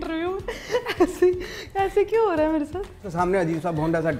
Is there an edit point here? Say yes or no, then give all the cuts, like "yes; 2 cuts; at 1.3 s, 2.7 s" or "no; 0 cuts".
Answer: yes; 1 cut; at 3.0 s